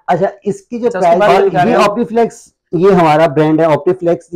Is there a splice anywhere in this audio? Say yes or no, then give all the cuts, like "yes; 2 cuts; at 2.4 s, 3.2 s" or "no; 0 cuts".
yes; 1 cut; at 1.2 s